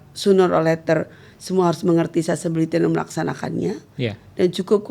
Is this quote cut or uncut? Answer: uncut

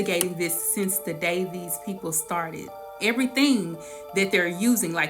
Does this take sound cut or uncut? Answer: cut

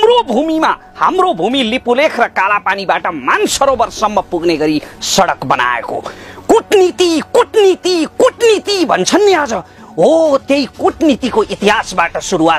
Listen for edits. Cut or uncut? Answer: uncut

